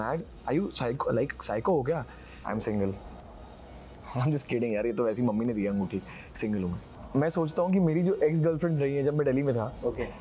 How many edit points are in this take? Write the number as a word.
two